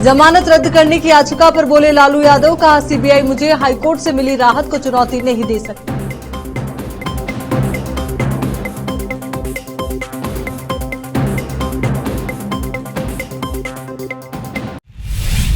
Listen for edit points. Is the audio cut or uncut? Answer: cut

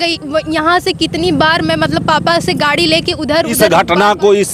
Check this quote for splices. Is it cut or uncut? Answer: cut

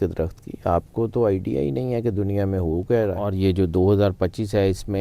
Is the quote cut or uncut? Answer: cut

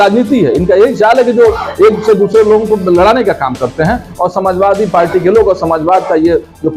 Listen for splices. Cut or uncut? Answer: uncut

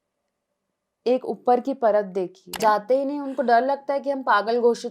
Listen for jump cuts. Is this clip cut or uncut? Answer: cut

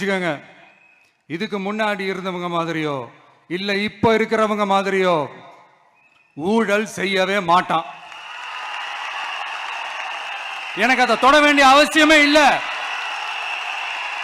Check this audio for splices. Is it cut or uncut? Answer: cut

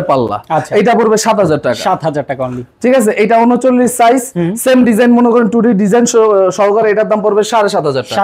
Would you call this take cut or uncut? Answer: uncut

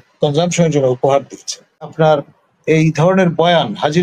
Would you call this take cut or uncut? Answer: cut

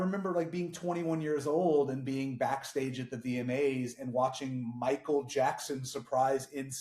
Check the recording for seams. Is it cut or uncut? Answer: uncut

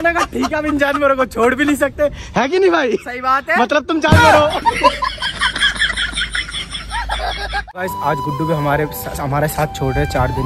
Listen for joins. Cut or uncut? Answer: cut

